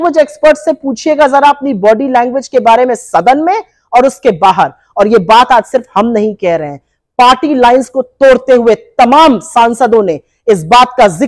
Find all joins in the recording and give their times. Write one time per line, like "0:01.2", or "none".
none